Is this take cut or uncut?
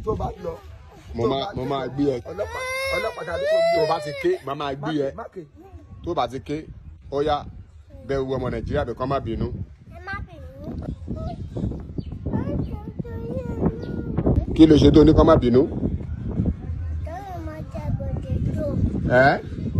cut